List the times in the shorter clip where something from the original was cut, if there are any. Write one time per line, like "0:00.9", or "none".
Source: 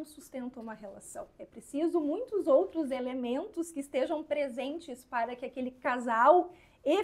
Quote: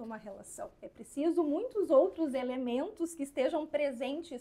none